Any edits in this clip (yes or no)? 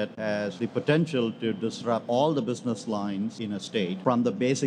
no